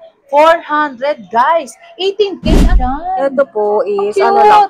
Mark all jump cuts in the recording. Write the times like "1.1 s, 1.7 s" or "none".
2.7 s